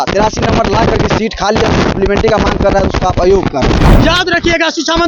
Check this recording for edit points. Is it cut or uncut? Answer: cut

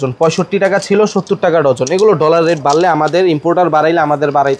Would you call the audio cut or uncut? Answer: uncut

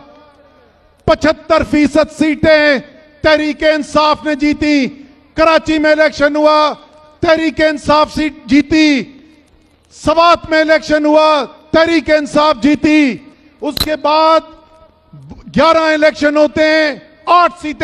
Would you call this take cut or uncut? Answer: uncut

